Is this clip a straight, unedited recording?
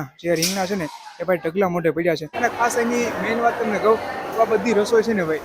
no; 1 cut; at 2.3 s

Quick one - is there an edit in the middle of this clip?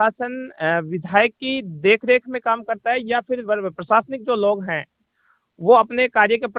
no; 0 cuts

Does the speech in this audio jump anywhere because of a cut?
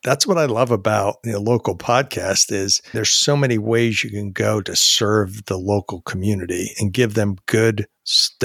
yes; 2 cuts; at 1.2 s, 2.8 s

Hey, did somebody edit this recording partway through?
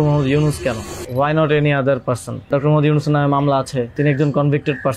yes; 3 cuts; at 0.9 s, 2.5 s, 3.9 s

